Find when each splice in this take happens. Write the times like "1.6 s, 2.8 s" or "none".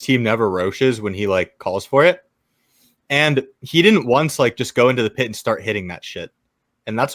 none